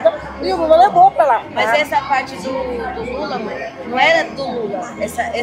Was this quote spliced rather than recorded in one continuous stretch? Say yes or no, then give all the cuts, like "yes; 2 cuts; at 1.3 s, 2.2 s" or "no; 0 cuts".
yes; 1 cut; at 1.5 s